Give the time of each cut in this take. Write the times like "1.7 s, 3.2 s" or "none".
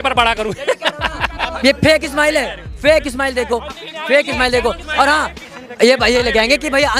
1.4 s, 5.4 s